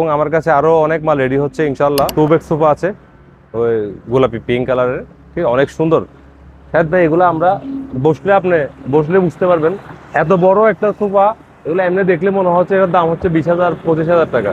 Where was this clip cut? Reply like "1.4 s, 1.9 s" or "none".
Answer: 2.1 s